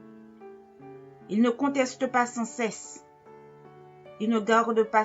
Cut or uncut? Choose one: cut